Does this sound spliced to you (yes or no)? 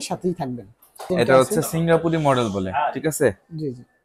yes